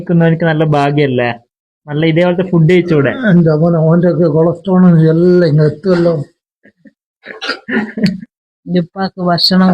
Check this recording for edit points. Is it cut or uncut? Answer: cut